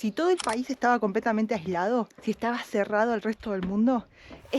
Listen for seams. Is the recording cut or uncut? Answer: cut